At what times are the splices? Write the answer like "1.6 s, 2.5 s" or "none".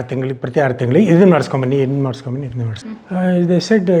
2.8 s